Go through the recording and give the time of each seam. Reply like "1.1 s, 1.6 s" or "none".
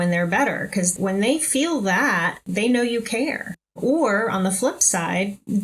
0.9 s, 2.5 s